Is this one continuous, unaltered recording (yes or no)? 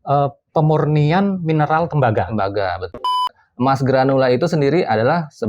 no